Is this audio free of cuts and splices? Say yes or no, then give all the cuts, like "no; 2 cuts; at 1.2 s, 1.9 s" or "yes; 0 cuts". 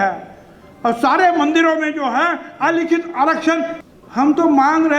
no; 1 cut; at 3.8 s